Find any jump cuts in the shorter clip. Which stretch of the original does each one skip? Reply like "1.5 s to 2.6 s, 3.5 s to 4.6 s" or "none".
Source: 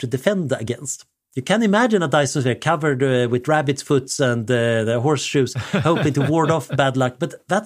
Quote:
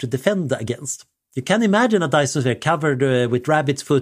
none